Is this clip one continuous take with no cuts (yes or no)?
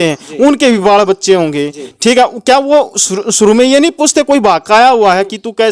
yes